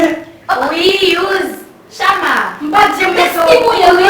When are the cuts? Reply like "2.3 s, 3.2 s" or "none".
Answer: 2.9 s